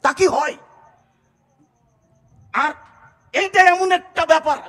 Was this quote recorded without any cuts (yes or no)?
yes